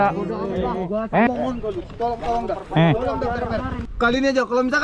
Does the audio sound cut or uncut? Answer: cut